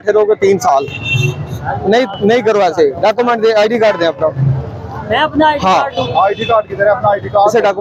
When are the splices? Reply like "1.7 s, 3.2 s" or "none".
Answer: none